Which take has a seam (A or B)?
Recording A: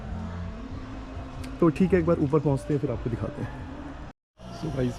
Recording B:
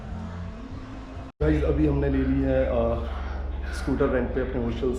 B